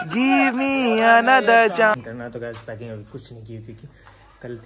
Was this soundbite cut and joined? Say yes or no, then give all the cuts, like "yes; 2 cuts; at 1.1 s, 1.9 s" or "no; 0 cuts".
yes; 1 cut; at 1.9 s